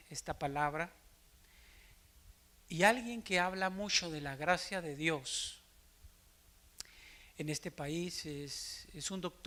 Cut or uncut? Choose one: uncut